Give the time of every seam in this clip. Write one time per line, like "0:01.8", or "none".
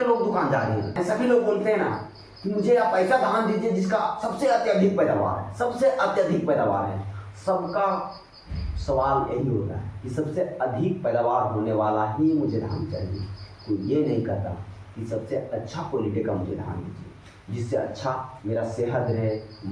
0:01.0